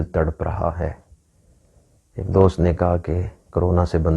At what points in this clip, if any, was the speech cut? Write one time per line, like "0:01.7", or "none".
none